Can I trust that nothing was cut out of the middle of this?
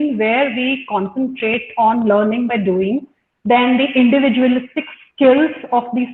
yes; 0 cuts

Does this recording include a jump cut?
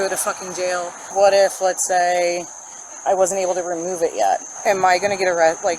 yes; 2 cuts; at 1.1 s, 4.5 s

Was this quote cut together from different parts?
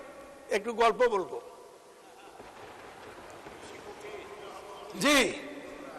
no; 0 cuts

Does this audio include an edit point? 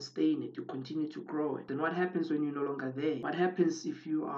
yes; 2 cuts; at 1.6 s, 3.2 s

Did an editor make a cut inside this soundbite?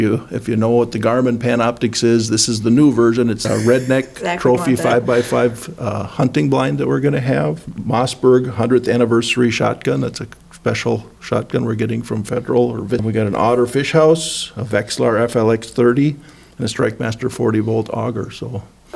yes; 3 cuts; at 3.4 s, 7.7 s, 13.0 s

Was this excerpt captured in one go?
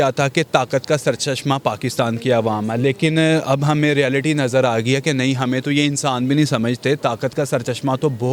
yes; 0 cuts

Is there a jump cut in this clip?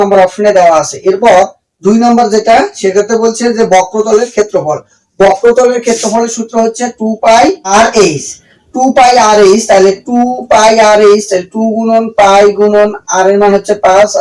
yes; 1 cut; at 7.7 s

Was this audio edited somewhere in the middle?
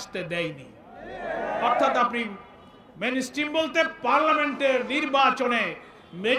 no; 0 cuts

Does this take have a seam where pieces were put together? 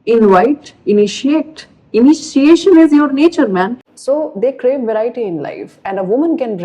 yes; 1 cut; at 3.9 s

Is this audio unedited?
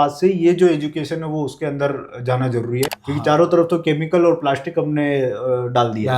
no; 1 cut; at 3.0 s

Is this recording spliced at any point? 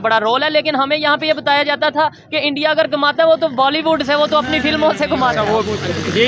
no; 0 cuts

